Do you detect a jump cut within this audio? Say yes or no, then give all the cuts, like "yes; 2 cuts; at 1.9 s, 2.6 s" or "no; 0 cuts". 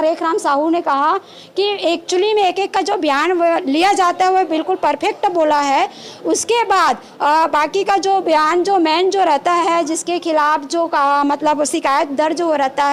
no; 0 cuts